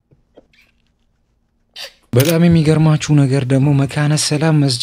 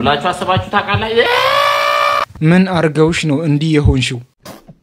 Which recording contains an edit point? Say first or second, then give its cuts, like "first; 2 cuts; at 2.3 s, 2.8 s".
first; 1 cut; at 2.0 s